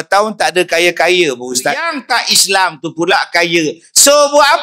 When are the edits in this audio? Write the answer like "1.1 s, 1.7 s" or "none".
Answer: 2.0 s